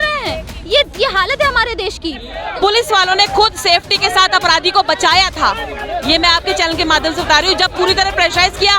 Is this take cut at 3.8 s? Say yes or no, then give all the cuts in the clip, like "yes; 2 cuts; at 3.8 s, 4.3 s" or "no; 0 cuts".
no; 1 cut; at 2.4 s